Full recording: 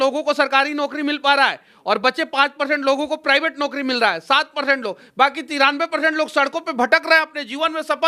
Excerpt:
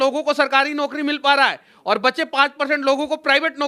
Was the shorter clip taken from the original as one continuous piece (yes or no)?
yes